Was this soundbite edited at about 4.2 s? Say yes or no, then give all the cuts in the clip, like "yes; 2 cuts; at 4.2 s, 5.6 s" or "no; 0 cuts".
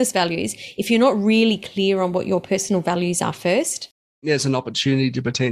yes; 1 cut; at 4.2 s